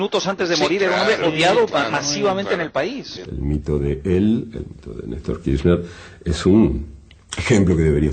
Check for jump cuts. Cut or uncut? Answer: cut